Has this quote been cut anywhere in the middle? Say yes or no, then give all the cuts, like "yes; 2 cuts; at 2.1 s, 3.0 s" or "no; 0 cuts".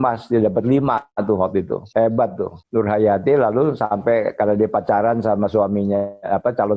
yes; 2 cuts; at 1.8 s, 2.5 s